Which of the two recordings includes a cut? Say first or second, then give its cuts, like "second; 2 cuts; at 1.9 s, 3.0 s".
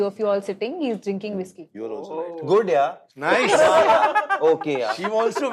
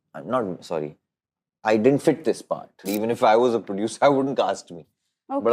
second; 1 cut; at 2.9 s